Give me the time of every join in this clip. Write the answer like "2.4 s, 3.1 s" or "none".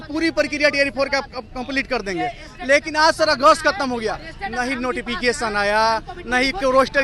none